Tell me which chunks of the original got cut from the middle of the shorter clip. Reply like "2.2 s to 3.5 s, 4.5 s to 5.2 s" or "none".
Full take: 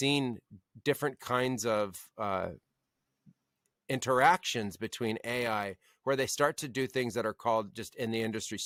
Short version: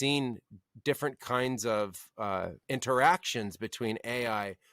2.6 s to 3.8 s